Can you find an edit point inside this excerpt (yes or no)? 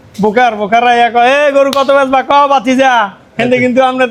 no